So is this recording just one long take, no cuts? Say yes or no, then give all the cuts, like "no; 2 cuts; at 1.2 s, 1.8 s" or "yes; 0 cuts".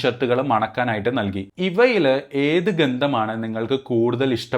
no; 1 cut; at 1.5 s